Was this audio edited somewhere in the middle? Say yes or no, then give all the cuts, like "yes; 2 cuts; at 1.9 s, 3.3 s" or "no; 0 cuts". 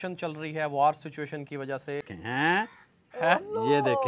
yes; 1 cut; at 2.1 s